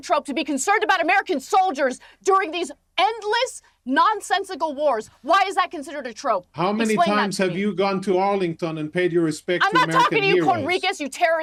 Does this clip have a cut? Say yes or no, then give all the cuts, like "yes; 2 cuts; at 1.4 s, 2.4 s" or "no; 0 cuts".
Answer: no; 0 cuts